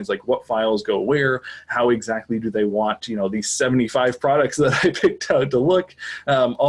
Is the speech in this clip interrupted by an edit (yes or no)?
no